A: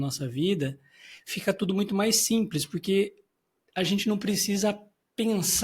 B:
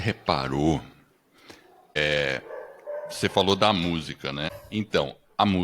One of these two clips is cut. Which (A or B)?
B